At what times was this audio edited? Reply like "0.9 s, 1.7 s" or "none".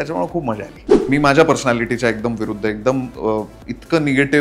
0.9 s